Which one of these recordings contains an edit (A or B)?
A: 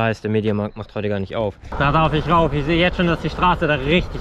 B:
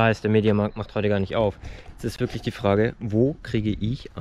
A